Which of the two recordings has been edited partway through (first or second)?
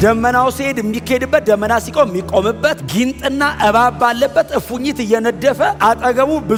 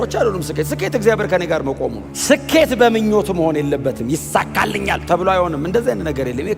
second